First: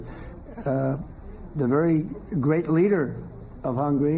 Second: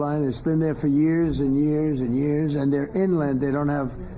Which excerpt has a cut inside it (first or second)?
second